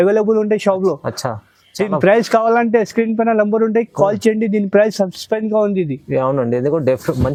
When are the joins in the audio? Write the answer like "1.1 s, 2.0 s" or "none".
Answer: none